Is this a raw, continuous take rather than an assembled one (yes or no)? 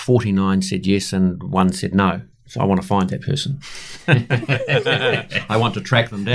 yes